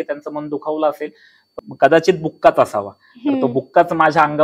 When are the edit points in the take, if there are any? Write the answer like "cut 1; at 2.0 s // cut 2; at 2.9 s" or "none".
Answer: cut 1; at 1.6 s

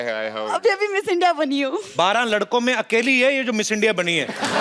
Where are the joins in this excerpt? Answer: cut 1; at 1.8 s

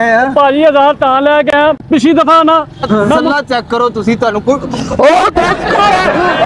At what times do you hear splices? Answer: cut 1; at 3.2 s

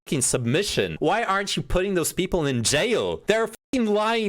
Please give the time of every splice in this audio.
cut 1; at 0.9 s // cut 2; at 3.2 s

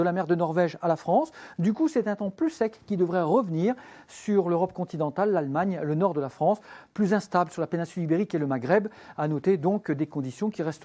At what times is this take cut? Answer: cut 1; at 7.8 s

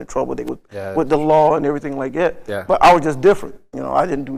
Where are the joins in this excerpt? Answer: none

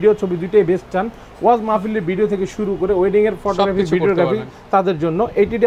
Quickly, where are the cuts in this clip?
none

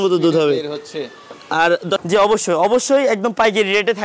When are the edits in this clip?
cut 1; at 2.0 s

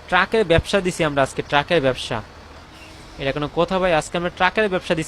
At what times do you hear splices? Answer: none

